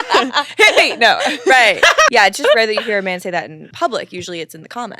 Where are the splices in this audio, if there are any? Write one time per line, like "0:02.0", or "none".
0:02.1
0:03.6

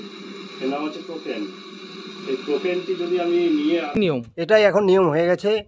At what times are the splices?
0:04.3

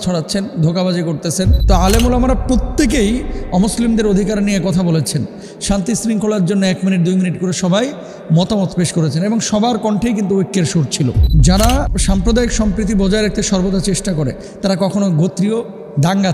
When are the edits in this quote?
0:01.6
0:11.2

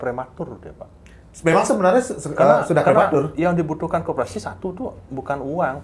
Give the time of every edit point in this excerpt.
none

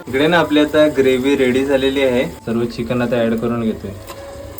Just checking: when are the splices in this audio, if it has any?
none

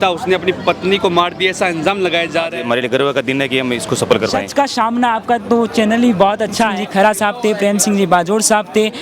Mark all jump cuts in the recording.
0:02.5
0:04.5
0:06.8

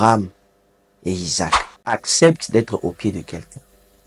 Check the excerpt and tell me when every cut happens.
0:01.7

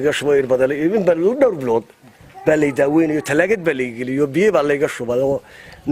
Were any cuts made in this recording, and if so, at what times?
none

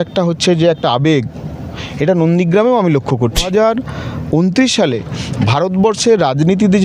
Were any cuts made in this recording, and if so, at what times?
0:03.5

